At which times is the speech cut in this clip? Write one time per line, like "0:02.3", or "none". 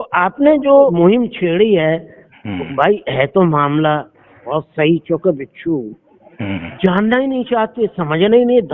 0:00.9